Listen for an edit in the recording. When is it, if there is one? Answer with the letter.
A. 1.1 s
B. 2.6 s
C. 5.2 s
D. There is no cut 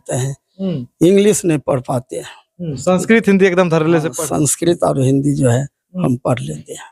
D